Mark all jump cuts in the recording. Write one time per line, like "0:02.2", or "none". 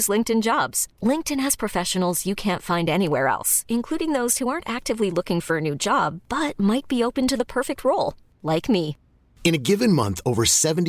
none